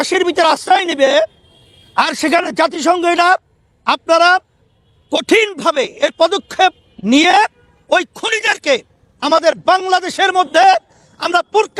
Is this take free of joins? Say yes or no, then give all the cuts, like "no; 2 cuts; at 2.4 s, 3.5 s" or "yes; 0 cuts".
yes; 0 cuts